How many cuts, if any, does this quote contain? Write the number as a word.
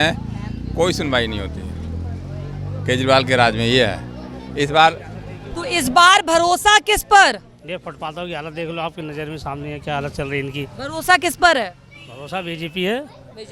zero